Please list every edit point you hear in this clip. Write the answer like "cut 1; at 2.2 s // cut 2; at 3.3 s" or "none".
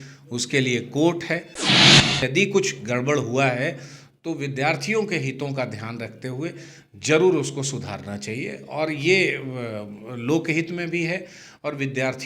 cut 1; at 1.8 s

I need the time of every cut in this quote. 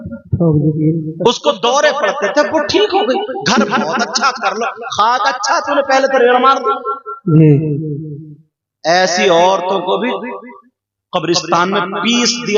none

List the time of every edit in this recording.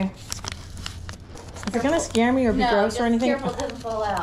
none

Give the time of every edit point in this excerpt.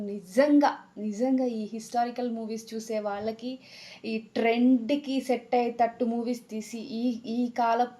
none

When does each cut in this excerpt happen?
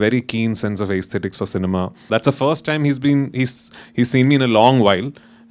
cut 1; at 2.1 s

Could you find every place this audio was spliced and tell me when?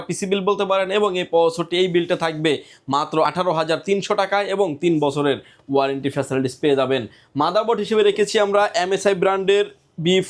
none

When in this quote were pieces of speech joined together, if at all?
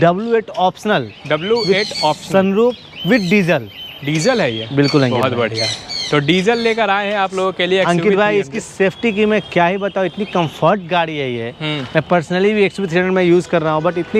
none

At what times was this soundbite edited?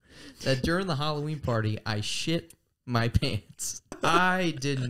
cut 1; at 4.0 s

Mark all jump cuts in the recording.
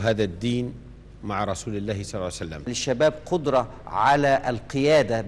cut 1; at 2.8 s

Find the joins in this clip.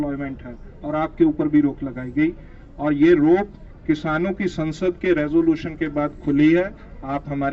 none

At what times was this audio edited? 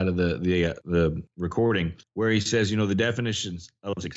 cut 1; at 1.0 s // cut 2; at 2.0 s

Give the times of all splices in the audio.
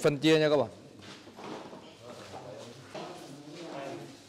cut 1; at 2.9 s

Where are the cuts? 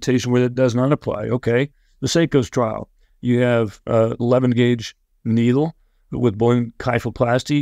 none

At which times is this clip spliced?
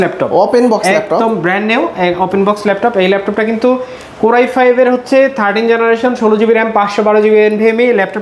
none

